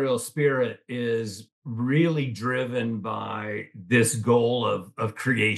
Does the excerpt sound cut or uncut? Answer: uncut